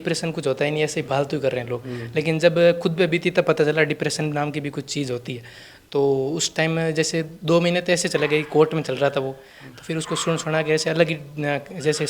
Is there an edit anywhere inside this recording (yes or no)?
no